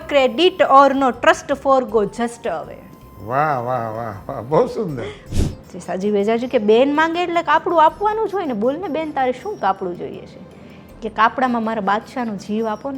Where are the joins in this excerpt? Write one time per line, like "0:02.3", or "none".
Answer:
0:05.2